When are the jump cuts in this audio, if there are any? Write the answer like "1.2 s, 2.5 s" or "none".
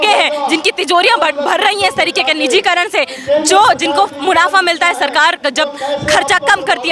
none